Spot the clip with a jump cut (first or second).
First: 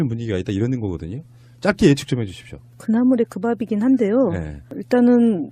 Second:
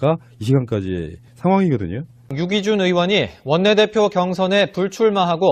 first